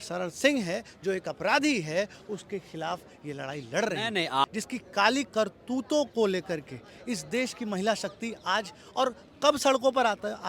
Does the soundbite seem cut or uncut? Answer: cut